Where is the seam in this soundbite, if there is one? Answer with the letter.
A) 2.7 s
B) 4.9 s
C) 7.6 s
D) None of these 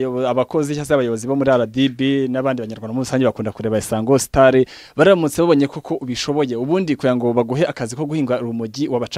D